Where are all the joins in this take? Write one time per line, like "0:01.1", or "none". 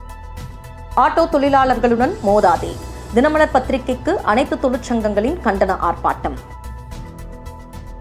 0:00.9